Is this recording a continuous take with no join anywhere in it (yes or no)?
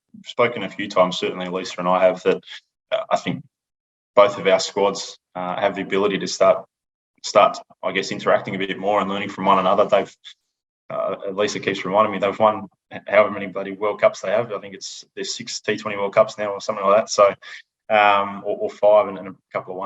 yes